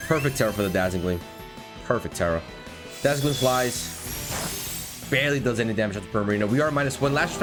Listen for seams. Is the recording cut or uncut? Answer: uncut